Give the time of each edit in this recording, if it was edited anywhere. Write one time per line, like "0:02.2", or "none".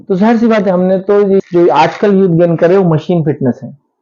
0:01.5

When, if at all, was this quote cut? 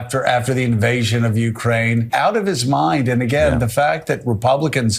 0:02.1

